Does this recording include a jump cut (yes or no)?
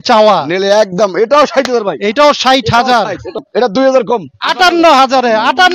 yes